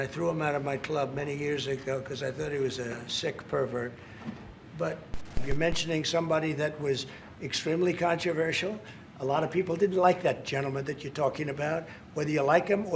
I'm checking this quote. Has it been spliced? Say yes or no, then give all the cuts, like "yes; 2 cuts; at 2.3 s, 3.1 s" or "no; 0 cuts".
yes; 1 cut; at 5.5 s